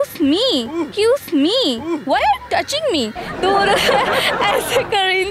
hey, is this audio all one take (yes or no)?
yes